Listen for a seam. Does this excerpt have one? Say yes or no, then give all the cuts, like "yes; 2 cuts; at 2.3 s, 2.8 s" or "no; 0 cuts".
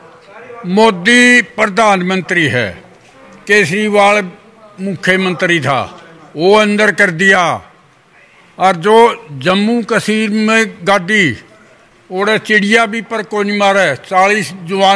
no; 0 cuts